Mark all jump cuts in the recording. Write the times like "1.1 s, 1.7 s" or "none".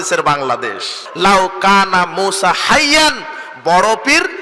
1.0 s